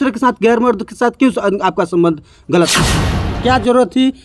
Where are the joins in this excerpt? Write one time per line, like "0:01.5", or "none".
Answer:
0:03.3